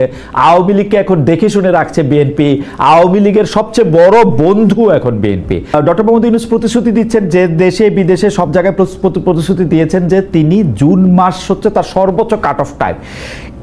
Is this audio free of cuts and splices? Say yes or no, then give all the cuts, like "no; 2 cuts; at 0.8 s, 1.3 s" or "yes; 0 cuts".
no; 1 cut; at 5.7 s